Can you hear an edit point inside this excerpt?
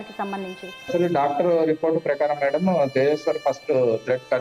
no; 0 cuts

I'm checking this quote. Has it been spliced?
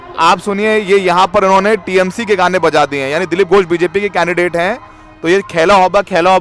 no; 0 cuts

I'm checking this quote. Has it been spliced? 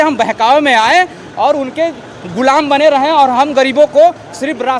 no; 0 cuts

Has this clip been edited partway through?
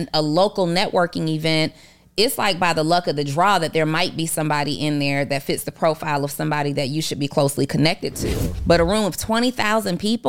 yes; 1 cut; at 8.5 s

